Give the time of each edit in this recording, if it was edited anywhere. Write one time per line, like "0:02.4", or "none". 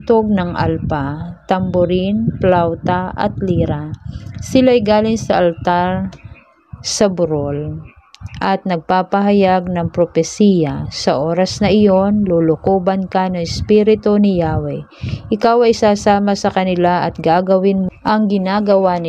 0:17.9